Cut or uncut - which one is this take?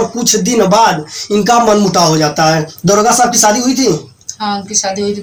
uncut